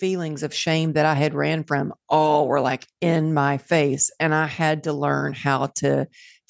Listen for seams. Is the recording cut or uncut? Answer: uncut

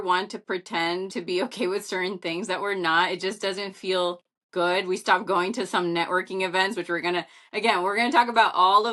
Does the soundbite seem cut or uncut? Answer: cut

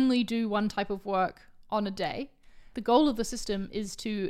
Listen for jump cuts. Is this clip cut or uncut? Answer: cut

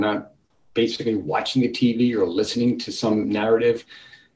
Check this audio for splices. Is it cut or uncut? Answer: uncut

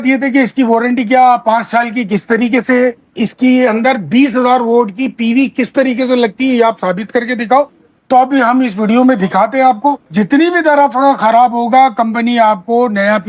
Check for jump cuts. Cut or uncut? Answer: cut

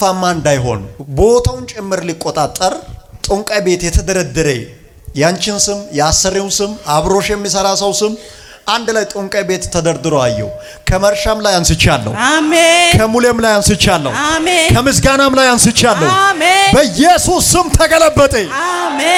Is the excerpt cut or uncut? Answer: uncut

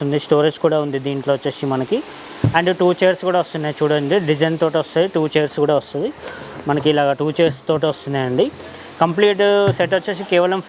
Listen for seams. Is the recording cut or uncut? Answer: uncut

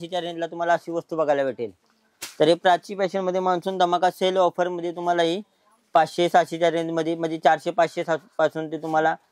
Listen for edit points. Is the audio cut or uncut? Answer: uncut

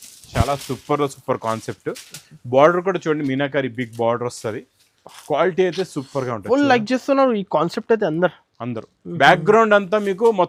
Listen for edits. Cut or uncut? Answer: uncut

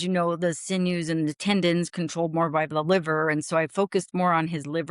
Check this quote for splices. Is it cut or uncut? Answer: uncut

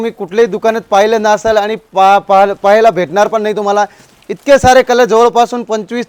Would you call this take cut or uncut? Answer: uncut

